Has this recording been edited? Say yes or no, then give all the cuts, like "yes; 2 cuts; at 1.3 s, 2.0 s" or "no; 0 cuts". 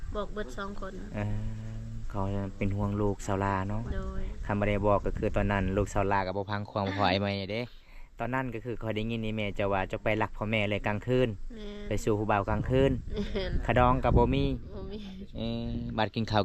no; 0 cuts